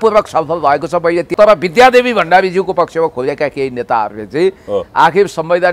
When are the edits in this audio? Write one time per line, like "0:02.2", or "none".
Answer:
0:01.3